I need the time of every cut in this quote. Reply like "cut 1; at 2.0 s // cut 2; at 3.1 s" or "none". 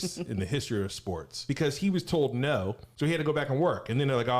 cut 1; at 1.4 s // cut 2; at 2.8 s

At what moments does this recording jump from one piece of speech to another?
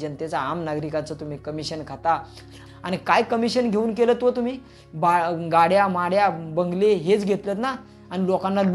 cut 1; at 2.6 s

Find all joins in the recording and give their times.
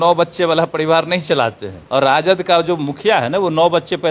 cut 1; at 1.8 s

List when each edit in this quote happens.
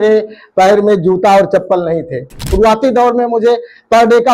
cut 1; at 2.5 s

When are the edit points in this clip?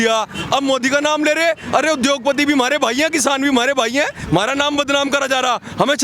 cut 1; at 4.2 s

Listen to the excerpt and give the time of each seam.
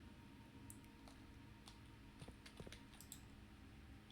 none

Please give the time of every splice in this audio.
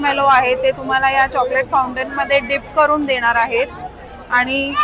none

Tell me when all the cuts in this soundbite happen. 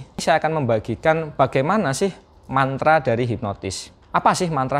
none

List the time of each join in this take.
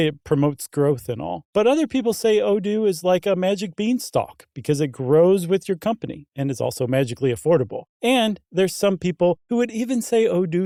none

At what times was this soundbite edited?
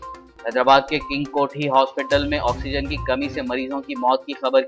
none

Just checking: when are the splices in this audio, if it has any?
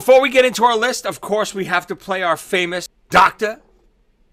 cut 1; at 3.0 s

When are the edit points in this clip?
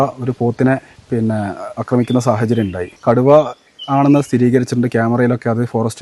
cut 1; at 0.9 s // cut 2; at 2.9 s

